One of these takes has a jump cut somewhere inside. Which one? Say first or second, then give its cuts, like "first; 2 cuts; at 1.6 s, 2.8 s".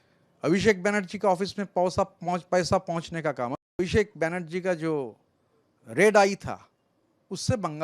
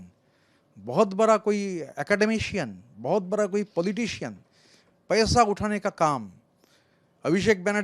first; 1 cut; at 3.7 s